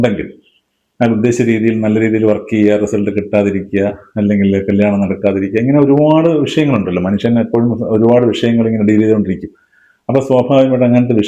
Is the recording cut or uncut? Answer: uncut